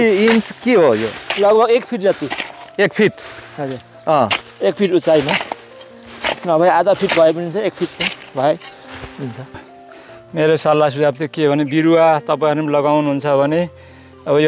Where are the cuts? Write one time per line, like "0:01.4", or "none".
0:09.6